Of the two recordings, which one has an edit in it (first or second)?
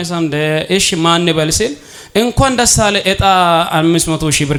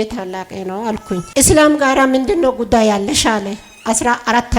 second